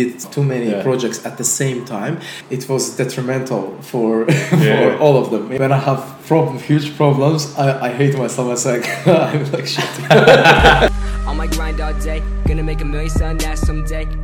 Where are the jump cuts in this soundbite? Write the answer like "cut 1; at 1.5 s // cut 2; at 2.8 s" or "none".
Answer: cut 1; at 2.3 s // cut 2; at 5.5 s // cut 3; at 10.9 s